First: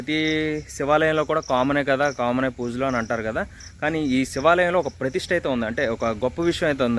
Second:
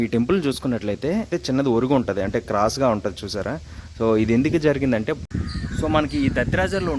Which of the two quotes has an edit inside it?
second; 2 cuts; at 1.4 s, 5.3 s

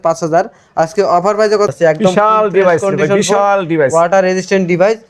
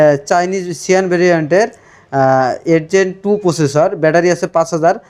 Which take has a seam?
first; 1 cut; at 1.7 s

